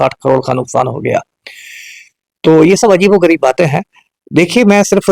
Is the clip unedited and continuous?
yes; 0 cuts

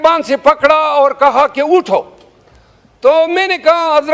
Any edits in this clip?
no; 0 cuts

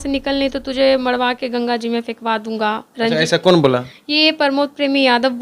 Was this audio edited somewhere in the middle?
no; 0 cuts

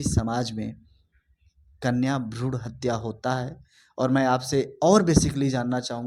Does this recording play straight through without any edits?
yes; 0 cuts

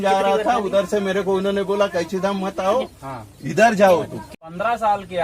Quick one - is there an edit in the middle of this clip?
yes; 1 cut; at 4.3 s

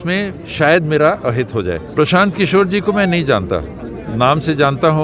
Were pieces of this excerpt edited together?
yes; 1 cut; at 1.8 s

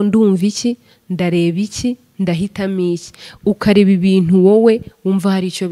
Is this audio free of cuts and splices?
yes; 0 cuts

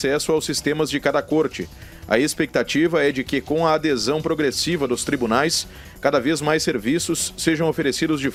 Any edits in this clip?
no; 0 cuts

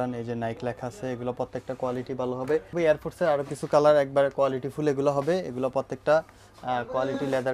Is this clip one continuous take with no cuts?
no; 1 cut; at 2.7 s

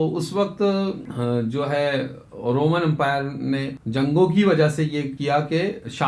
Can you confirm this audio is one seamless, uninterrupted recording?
no; 3 cuts; at 1.1 s, 3.8 s, 5.1 s

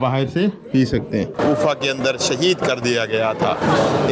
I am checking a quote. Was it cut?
yes; 1 cut; at 1.3 s

